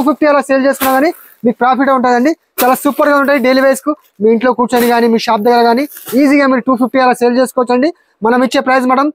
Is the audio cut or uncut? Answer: uncut